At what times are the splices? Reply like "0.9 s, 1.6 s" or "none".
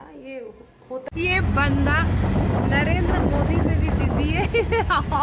1.1 s